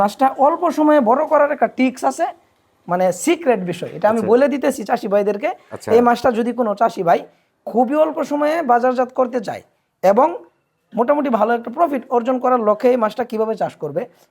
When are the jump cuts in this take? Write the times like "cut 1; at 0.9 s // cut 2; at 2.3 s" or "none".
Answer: none